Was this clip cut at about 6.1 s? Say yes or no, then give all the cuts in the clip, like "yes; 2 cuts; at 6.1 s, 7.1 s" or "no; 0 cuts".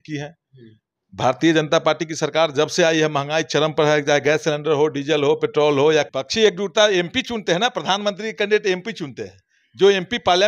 yes; 1 cut; at 6.1 s